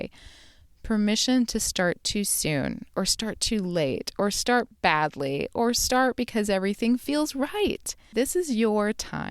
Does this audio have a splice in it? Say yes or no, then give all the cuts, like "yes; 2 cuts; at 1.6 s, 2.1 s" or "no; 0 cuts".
yes; 1 cut; at 7.9 s